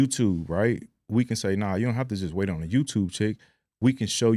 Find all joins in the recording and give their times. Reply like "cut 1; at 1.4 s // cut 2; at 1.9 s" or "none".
none